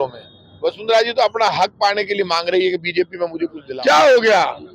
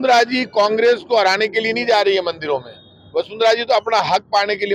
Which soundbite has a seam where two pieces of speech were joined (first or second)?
first